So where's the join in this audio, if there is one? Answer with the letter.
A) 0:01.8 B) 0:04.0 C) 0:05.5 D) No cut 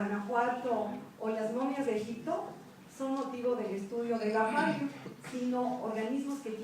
C